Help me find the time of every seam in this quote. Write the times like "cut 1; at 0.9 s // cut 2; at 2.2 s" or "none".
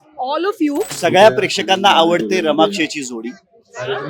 cut 1; at 0.9 s